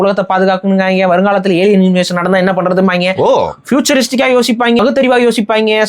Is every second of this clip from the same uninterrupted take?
no; 1 cut; at 4.8 s

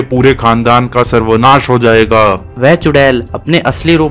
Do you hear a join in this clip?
yes; 1 cut; at 2.5 s

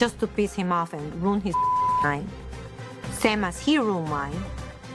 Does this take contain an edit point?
no; 0 cuts

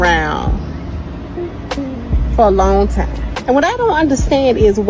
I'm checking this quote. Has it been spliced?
no; 0 cuts

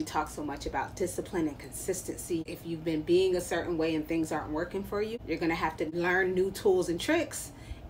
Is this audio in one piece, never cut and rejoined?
no; 3 cuts; at 2.5 s, 5.1 s, 5.9 s

